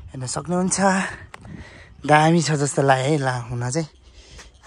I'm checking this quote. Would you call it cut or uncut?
uncut